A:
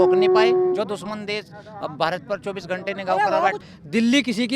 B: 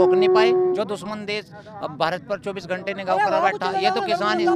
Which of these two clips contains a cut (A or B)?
A